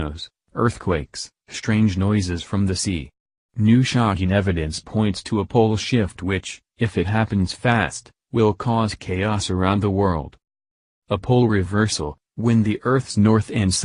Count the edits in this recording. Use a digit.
1